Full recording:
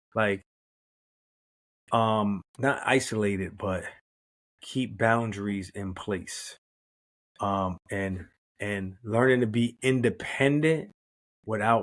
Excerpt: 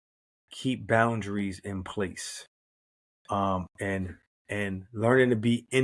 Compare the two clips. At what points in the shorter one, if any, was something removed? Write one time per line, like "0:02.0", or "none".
none

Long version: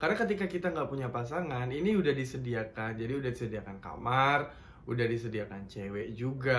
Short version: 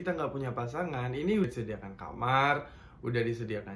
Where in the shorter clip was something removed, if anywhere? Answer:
0:01.5

